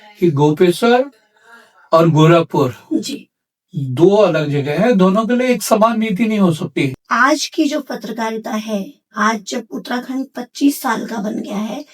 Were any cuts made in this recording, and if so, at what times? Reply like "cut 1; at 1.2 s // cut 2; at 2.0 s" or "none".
cut 1; at 7.0 s